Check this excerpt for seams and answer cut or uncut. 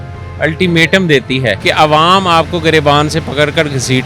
cut